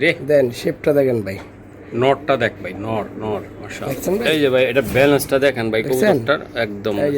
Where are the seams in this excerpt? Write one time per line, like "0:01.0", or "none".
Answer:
0:04.2